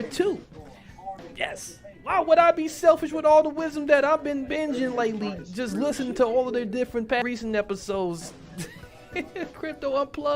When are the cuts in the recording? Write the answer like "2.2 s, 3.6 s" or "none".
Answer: 7.2 s